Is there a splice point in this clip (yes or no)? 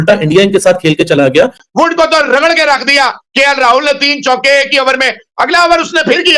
yes